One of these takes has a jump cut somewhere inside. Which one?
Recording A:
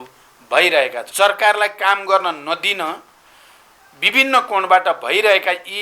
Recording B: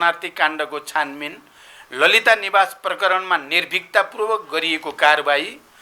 A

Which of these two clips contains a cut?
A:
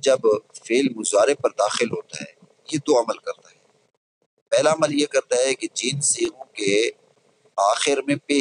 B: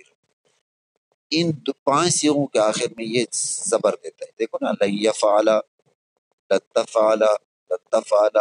A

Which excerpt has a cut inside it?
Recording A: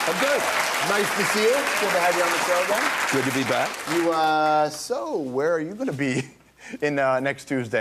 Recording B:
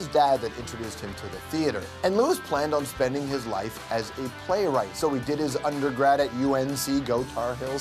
B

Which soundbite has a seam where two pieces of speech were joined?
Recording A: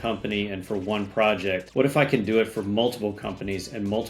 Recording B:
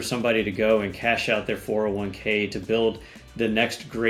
A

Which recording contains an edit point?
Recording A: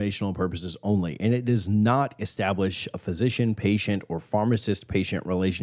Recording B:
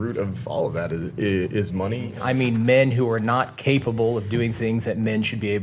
B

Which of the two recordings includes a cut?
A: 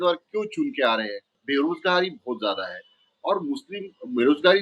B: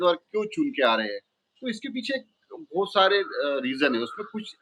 A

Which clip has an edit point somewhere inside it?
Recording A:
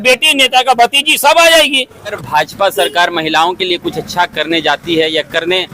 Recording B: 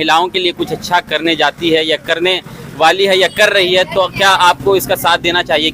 A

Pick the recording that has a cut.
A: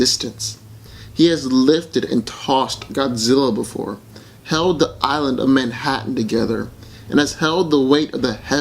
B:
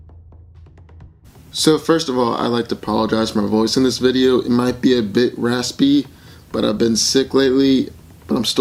A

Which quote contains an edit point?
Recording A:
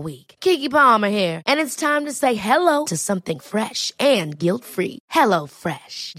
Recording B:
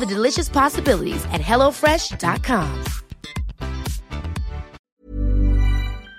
B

